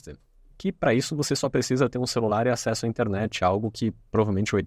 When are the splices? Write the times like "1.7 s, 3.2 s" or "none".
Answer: none